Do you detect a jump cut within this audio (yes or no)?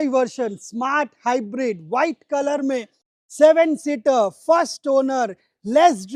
no